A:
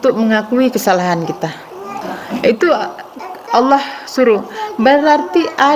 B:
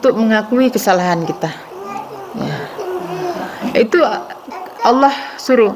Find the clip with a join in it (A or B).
A